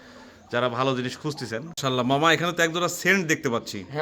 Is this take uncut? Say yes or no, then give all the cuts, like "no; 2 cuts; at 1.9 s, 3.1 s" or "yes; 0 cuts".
no; 1 cut; at 1.7 s